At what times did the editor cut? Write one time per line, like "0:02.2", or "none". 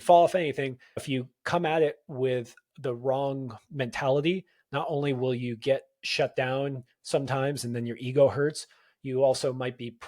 0:01.0